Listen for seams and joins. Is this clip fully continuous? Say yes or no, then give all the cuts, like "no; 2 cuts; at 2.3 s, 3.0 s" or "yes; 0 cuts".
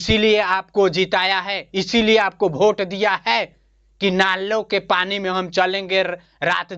yes; 0 cuts